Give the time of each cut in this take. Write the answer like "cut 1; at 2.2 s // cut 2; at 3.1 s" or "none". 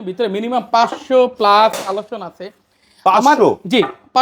none